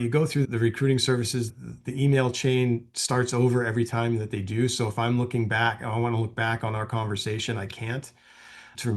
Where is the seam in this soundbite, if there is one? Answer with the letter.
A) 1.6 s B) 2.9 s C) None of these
A